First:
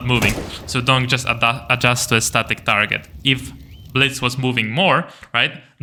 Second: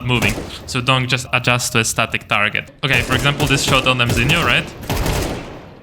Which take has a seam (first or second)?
second